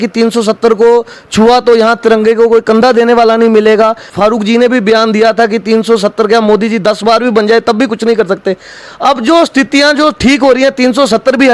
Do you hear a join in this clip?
yes; 1 cut; at 4.0 s

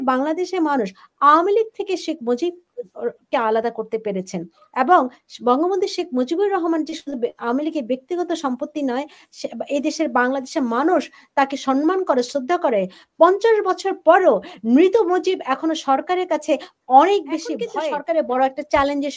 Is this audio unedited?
no; 1 cut; at 17.6 s

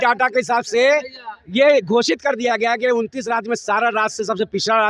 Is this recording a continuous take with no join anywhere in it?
yes; 0 cuts

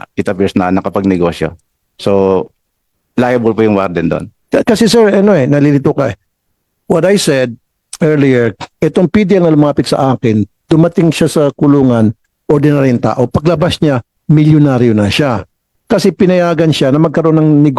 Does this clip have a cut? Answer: yes; 1 cut; at 4.3 s

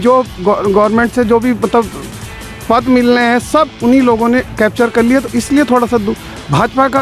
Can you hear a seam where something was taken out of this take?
no; 0 cuts

